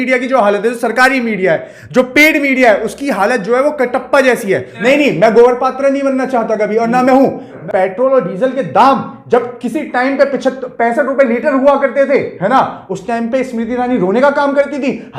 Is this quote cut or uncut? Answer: cut